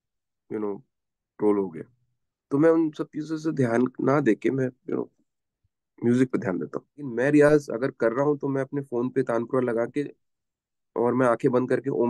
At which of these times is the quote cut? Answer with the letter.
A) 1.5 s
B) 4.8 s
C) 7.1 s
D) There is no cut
C